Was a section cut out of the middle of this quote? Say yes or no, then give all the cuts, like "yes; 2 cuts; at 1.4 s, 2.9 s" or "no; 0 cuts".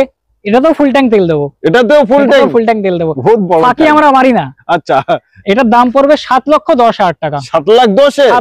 no; 0 cuts